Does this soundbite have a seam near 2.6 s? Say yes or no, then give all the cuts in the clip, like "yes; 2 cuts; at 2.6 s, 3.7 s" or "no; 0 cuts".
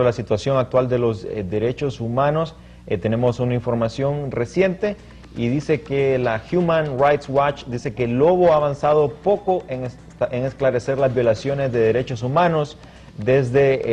no; 0 cuts